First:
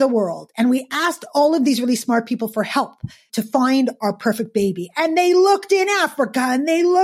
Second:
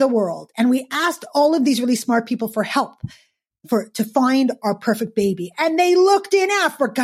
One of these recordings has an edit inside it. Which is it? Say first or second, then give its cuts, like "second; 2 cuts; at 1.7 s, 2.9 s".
first; 1 cut; at 3.3 s